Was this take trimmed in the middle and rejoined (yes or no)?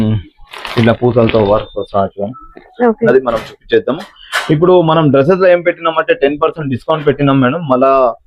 yes